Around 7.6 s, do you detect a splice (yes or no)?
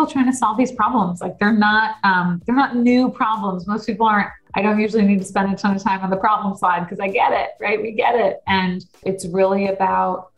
no